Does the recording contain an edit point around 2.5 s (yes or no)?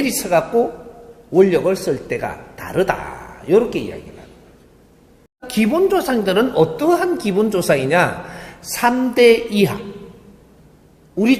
no